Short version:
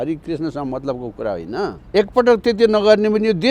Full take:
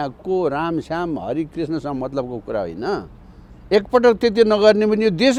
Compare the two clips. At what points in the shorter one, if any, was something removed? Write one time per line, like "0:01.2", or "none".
0:01.8